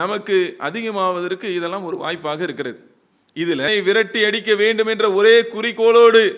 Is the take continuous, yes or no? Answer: no